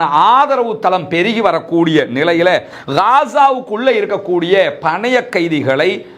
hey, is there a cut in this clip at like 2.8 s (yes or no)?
yes